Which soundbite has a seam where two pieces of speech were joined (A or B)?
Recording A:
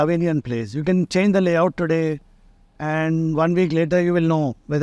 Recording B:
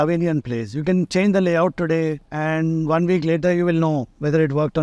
B